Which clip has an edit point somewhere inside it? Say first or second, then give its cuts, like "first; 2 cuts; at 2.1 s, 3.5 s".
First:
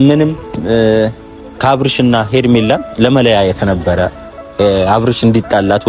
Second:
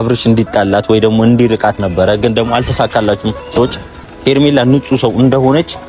second; 1 cut; at 4.0 s